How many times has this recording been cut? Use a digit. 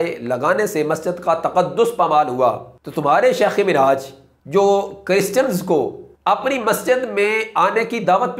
0